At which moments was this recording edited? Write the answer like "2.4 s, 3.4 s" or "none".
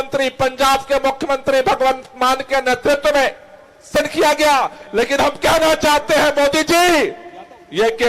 3.9 s